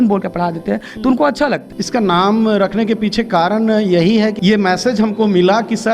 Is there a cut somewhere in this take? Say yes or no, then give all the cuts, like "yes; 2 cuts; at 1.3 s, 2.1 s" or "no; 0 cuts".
yes; 2 cuts; at 1.7 s, 4.3 s